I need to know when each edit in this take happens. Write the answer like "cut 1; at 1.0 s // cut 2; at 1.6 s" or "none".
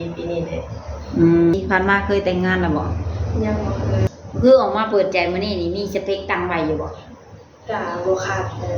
cut 1; at 1.5 s // cut 2; at 4.1 s